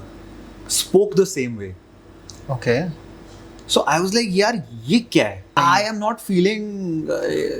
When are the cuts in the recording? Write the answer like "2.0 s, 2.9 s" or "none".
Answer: 5.5 s